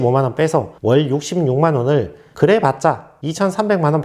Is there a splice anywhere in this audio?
yes; 1 cut; at 2.3 s

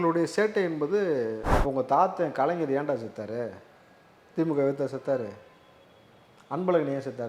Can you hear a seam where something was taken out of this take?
yes; 1 cut; at 1.4 s

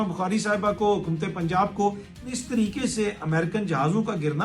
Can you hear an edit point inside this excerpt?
yes; 1 cut; at 2.2 s

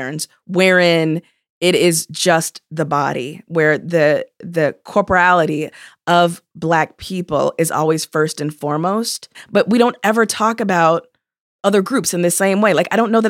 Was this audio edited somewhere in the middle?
yes; 1 cut; at 9.4 s

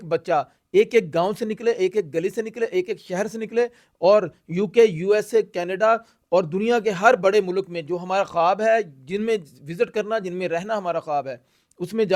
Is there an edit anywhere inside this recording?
no; 0 cuts

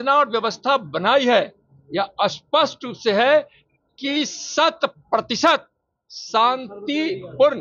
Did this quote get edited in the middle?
no; 0 cuts

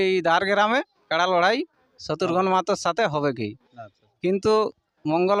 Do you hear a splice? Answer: no; 0 cuts

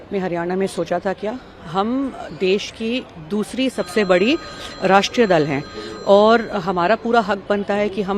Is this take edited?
no; 0 cuts

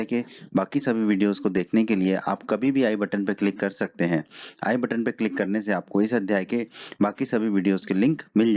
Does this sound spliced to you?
yes; 1 cut; at 3.4 s

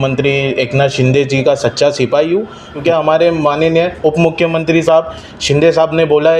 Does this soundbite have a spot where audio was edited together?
yes; 1 cut; at 2.8 s

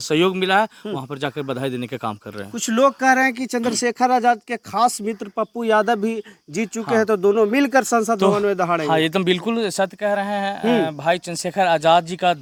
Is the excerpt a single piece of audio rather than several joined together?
yes; 0 cuts

